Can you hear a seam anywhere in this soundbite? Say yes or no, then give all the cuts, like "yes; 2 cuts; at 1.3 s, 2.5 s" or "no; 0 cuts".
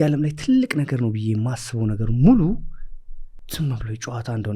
no; 0 cuts